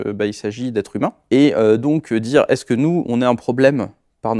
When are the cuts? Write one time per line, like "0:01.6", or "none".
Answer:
0:01.2